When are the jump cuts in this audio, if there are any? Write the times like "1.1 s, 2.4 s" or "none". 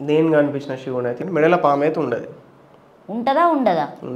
1.2 s